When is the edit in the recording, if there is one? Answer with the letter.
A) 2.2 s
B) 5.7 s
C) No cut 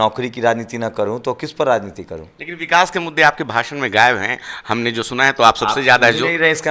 C